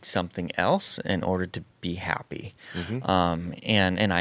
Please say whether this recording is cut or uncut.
uncut